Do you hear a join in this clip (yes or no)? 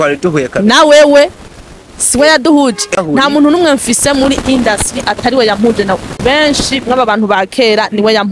yes